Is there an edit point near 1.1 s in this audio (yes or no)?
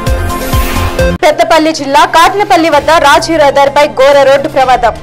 yes